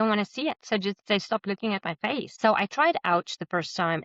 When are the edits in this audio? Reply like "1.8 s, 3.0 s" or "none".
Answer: 2.3 s